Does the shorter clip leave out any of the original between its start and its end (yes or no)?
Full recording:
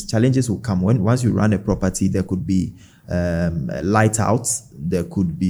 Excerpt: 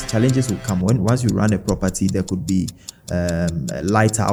no